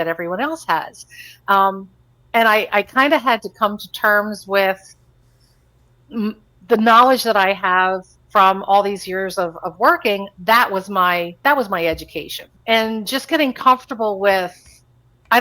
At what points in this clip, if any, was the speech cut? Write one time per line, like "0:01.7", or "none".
0:12.4